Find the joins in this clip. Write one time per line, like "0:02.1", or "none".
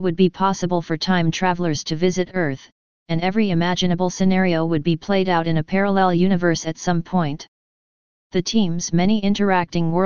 0:08.9